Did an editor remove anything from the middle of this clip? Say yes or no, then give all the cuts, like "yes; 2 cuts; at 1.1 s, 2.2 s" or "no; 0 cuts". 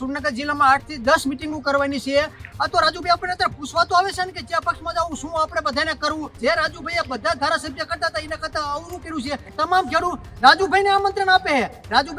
yes; 3 cuts; at 2.5 s, 6.3 s, 9.5 s